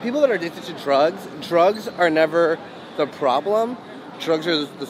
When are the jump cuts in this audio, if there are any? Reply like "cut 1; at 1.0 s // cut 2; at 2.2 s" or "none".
none